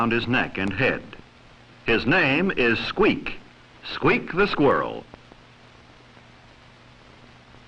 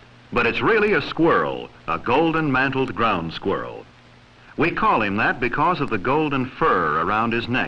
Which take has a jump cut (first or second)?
first